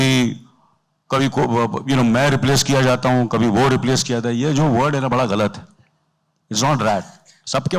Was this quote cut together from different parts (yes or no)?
no